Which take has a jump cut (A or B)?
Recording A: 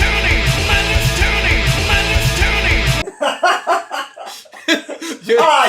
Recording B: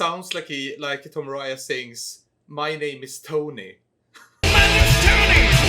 A